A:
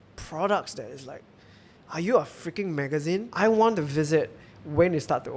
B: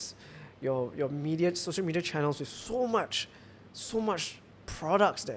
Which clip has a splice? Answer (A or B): A